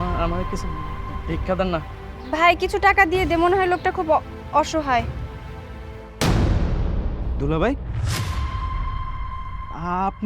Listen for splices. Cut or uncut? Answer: uncut